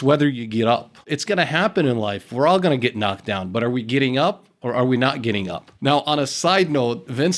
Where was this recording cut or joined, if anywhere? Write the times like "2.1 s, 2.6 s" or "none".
1.1 s